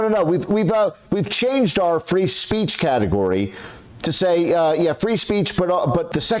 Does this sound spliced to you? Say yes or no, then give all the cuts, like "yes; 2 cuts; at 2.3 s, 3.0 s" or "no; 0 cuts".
no; 0 cuts